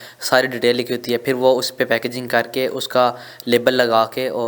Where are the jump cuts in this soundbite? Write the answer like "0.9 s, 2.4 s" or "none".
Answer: none